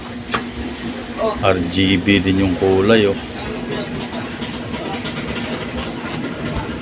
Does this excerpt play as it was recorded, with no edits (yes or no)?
no